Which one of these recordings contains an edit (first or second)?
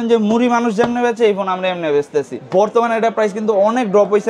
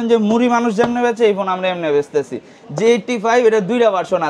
first